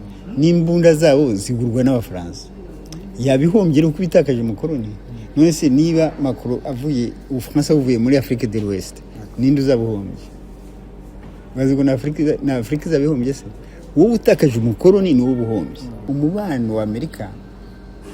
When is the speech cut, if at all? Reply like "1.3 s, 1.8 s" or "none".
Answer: 16.0 s